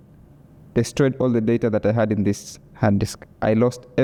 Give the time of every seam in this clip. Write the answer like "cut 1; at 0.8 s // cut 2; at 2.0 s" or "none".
none